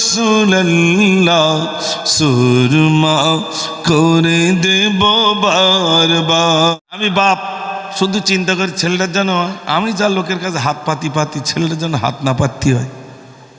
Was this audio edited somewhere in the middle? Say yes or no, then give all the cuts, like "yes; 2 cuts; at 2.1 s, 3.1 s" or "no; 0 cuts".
yes; 1 cut; at 6.7 s